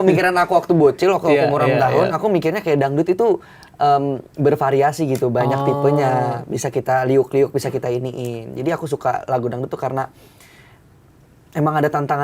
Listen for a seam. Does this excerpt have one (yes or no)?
no